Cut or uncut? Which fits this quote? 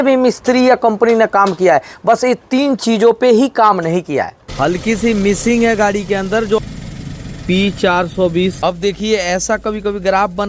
cut